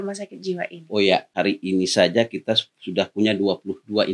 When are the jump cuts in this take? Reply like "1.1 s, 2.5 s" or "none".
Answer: 1.3 s